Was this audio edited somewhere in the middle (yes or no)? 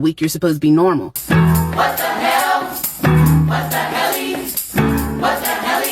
yes